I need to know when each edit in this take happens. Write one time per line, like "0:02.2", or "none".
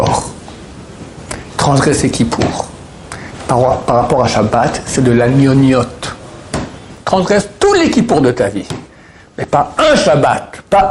0:07.0